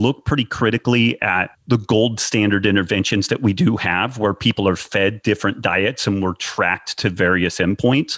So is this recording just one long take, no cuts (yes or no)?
no